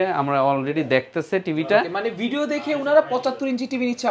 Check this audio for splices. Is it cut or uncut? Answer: uncut